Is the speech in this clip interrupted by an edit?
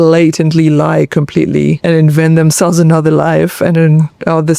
no; 0 cuts

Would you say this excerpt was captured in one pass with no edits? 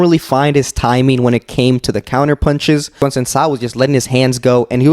no; 1 cut; at 3.0 s

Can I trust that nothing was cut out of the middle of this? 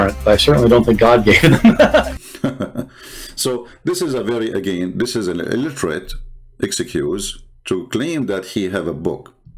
yes; 0 cuts

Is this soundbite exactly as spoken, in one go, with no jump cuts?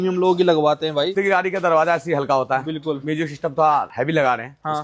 no; 1 cut; at 1.1 s

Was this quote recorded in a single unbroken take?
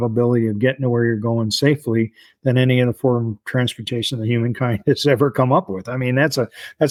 yes; 0 cuts

